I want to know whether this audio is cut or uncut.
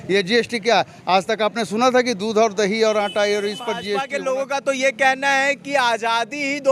cut